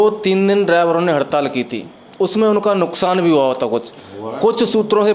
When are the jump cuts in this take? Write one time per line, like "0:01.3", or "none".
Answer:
none